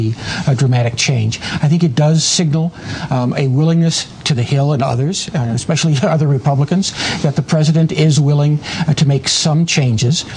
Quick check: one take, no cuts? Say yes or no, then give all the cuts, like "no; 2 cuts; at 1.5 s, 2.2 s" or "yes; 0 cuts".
yes; 0 cuts